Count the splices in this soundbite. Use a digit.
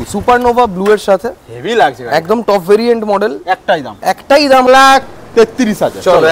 1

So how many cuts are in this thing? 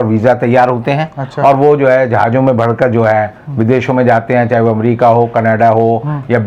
0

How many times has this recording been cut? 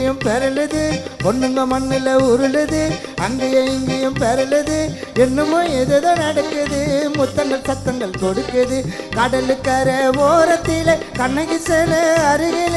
0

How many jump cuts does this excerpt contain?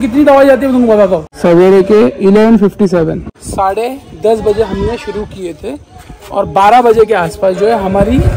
1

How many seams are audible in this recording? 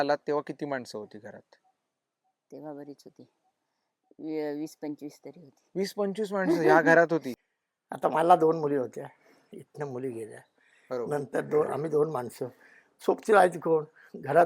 1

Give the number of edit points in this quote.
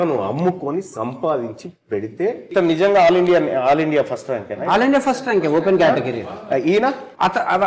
1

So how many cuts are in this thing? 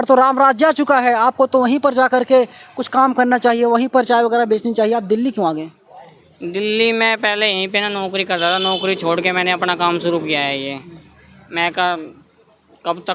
0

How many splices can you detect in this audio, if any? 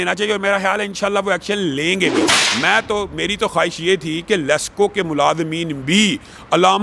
1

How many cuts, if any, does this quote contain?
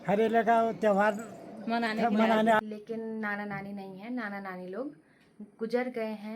1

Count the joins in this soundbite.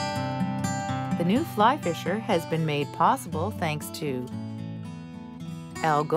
3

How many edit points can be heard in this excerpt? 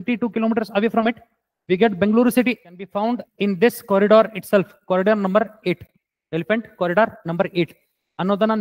1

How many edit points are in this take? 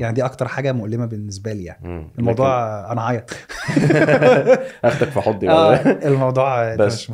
0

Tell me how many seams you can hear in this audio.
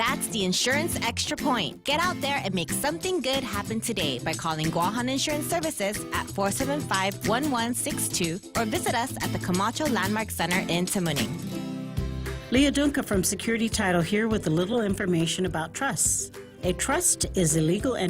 1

